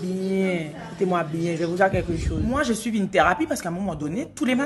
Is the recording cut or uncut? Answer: cut